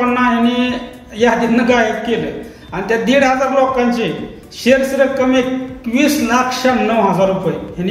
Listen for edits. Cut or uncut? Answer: uncut